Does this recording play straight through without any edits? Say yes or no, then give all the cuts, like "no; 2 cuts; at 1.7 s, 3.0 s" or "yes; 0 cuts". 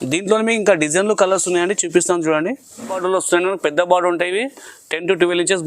no; 1 cut; at 3.0 s